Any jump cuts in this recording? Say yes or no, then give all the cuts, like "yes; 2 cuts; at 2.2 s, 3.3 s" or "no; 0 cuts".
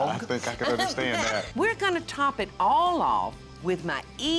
yes; 2 cuts; at 1.6 s, 3.5 s